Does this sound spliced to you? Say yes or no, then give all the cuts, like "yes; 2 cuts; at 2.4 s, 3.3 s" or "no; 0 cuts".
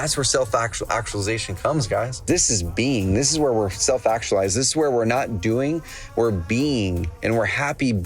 yes; 1 cut; at 2.2 s